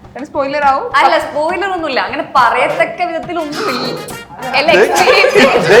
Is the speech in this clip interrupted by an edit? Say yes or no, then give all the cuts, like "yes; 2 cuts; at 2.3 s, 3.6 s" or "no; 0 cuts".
no; 0 cuts